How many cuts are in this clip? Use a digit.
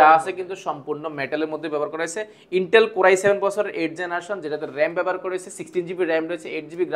0